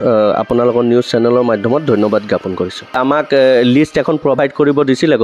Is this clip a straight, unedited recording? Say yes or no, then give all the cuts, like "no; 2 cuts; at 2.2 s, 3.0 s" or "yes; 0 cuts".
no; 1 cut; at 3.0 s